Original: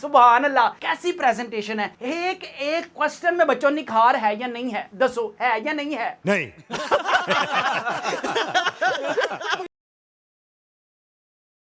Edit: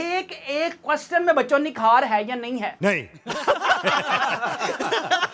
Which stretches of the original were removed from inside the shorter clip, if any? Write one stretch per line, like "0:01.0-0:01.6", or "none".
0:04.9-0:06.2